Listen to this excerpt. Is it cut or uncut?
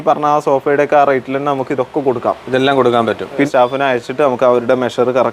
cut